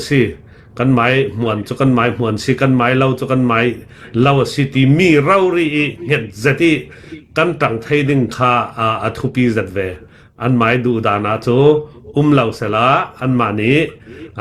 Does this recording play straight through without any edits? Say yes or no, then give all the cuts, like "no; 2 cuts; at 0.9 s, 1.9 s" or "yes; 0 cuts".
yes; 0 cuts